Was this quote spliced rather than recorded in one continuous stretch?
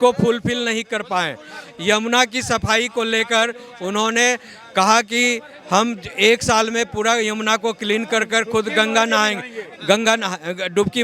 no; 0 cuts

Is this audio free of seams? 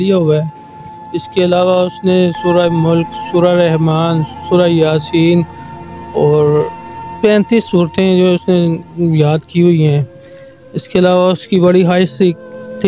yes; 0 cuts

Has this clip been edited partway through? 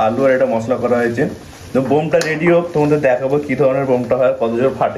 no; 0 cuts

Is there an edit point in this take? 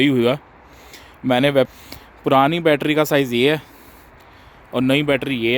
yes; 1 cut; at 1.7 s

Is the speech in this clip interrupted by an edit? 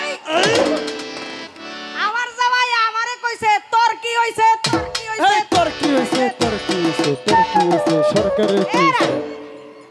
no; 0 cuts

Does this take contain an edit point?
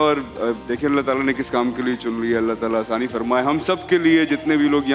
no; 0 cuts

